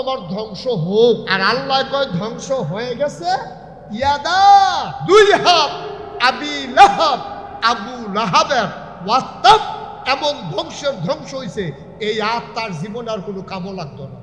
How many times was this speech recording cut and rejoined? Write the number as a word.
two